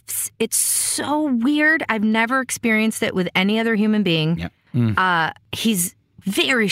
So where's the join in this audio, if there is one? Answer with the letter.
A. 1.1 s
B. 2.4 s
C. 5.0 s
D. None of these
C